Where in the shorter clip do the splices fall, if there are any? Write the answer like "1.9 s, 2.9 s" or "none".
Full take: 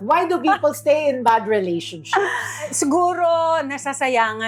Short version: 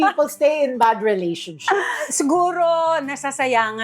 2.0 s